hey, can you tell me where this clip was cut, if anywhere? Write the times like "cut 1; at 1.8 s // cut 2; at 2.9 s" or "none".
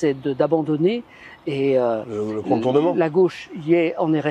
none